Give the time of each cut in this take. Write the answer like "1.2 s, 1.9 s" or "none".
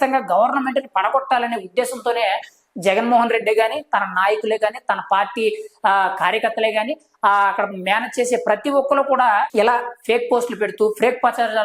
9.5 s